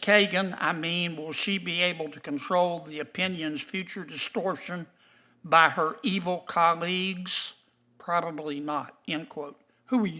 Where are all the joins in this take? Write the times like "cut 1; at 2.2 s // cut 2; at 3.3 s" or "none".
none